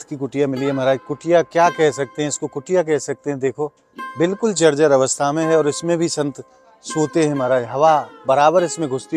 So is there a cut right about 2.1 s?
no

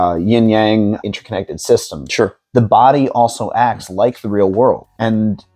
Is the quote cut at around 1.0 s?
yes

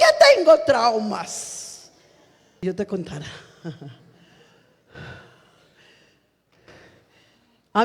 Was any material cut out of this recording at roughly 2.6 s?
yes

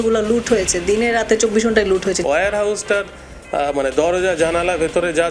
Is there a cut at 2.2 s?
yes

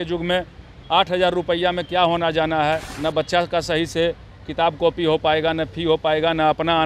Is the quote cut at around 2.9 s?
yes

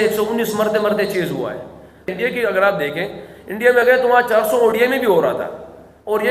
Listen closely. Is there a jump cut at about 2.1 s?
yes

